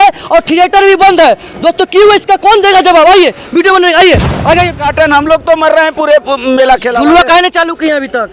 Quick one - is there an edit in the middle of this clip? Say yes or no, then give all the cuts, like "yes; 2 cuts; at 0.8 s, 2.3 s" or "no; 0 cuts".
yes; 1 cut; at 4.8 s